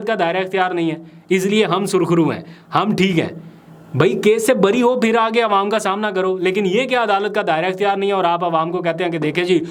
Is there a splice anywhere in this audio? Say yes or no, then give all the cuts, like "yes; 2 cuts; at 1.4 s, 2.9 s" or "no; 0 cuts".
no; 0 cuts